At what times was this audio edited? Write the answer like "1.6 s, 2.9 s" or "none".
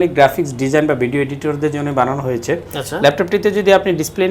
none